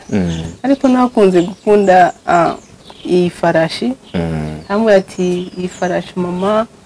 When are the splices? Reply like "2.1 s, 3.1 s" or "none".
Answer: none